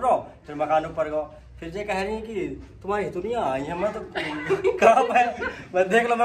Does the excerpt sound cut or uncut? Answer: uncut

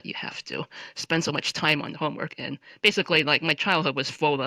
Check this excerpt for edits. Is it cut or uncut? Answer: uncut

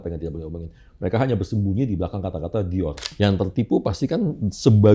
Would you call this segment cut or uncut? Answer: cut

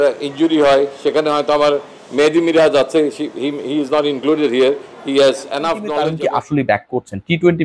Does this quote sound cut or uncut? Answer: cut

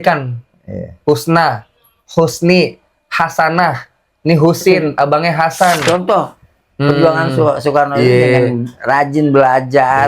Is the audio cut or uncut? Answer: cut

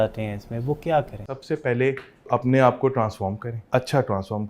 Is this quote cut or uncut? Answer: cut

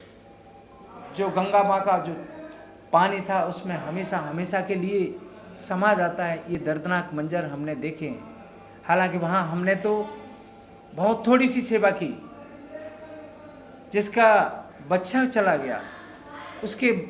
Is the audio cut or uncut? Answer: uncut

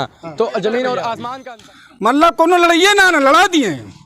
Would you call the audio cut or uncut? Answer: cut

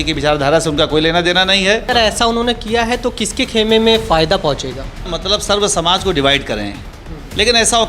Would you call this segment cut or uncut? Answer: cut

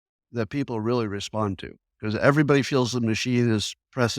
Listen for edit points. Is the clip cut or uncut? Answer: uncut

